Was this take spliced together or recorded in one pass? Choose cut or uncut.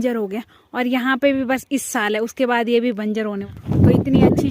cut